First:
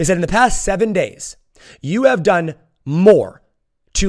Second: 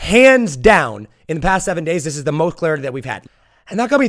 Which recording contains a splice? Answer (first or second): second